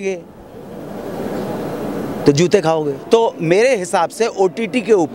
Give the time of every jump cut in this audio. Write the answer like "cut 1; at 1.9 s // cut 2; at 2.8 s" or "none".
cut 1; at 3.0 s